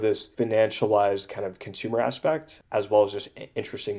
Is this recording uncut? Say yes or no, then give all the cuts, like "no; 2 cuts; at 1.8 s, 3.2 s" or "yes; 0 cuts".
yes; 0 cuts